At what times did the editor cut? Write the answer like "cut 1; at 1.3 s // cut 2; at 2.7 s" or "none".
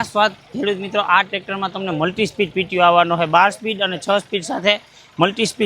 none